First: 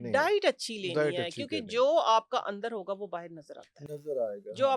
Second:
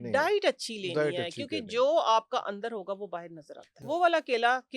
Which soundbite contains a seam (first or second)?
second